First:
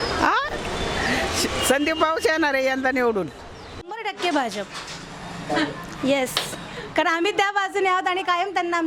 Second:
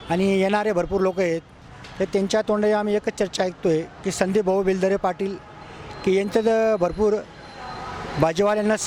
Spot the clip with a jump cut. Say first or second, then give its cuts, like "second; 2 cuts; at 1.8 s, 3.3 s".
first; 1 cut; at 3.8 s